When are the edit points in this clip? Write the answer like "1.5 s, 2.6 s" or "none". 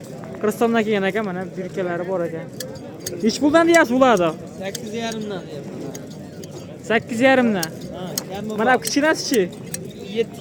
none